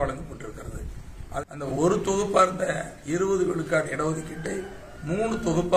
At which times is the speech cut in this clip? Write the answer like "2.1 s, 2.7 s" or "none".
1.4 s